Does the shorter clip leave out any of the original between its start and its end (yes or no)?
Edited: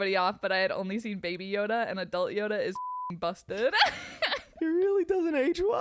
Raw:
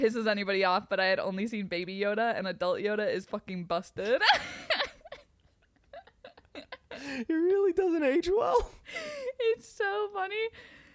yes